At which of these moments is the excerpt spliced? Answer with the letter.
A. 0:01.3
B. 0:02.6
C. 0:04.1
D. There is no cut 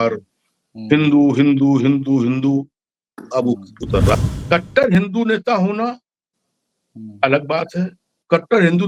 C